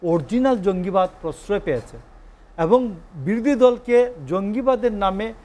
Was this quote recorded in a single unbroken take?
yes; 0 cuts

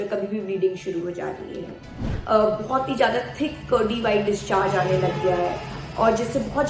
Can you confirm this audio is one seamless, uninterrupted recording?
no; 1 cut; at 2.1 s

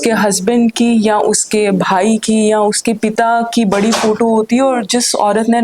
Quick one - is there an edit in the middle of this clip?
no; 0 cuts

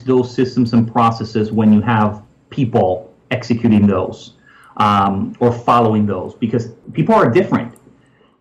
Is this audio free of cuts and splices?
no; 1 cut; at 6.8 s

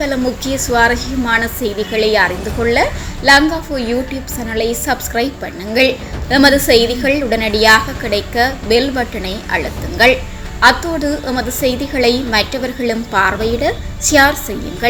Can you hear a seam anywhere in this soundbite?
no; 0 cuts

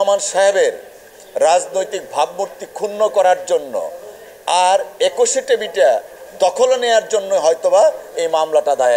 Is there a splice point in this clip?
no; 0 cuts

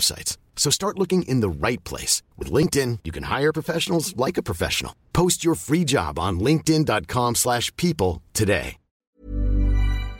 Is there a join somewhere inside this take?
yes; 1 cut; at 8.9 s

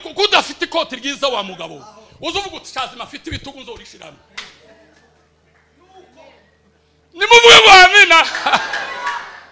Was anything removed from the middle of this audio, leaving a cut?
no; 0 cuts

